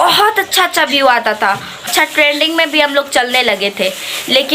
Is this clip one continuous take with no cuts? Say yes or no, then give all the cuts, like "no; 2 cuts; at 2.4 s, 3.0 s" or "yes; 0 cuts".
no; 1 cut; at 1.8 s